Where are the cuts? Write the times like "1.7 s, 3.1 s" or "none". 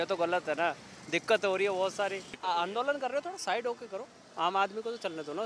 2.4 s